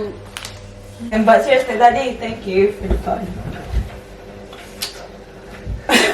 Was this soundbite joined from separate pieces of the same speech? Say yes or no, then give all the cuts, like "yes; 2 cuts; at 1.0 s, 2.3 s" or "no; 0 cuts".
yes; 1 cut; at 1.1 s